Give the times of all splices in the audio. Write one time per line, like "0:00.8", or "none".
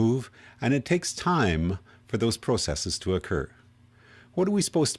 0:01.8